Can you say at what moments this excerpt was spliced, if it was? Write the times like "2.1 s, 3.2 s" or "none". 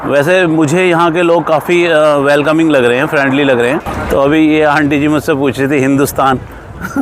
3.9 s